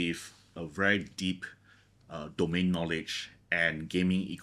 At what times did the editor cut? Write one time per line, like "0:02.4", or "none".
none